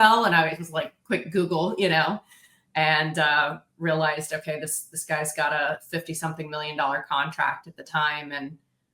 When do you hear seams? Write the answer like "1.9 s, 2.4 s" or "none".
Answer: none

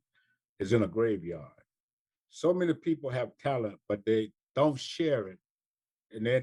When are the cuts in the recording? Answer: none

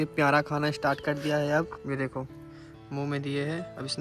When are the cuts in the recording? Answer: 1.8 s

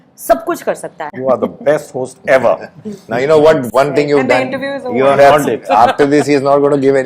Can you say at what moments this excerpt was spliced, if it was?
1.1 s

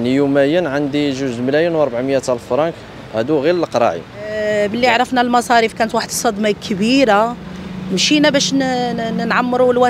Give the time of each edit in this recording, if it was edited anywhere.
4.4 s

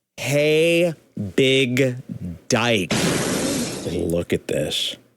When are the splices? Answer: 3.7 s

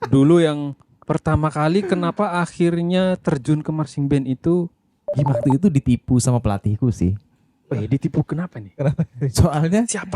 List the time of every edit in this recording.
5.3 s

